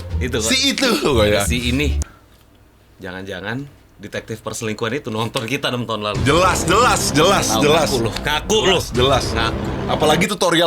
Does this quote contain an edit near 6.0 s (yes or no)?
no